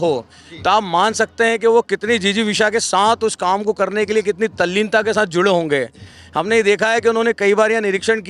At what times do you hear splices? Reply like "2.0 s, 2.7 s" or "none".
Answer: none